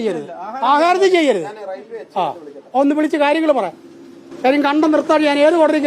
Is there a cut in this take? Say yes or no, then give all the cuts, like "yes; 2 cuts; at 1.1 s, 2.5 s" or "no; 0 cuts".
no; 0 cuts